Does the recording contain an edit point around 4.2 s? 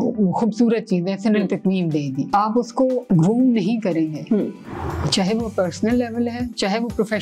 no; 1 cut; at 2.4 s

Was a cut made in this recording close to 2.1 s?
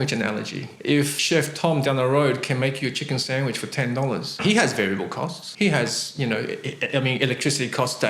no; 3 cuts; at 0.9 s, 4.4 s, 5.4 s

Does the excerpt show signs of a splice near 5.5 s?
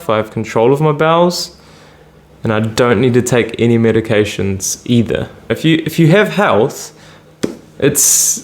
yes; 1 cut; at 5.5 s

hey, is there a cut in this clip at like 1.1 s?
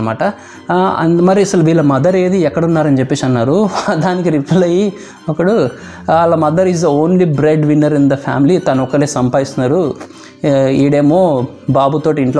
no; 0 cuts

